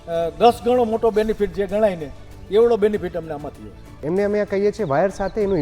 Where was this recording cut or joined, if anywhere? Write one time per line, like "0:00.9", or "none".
0:04.0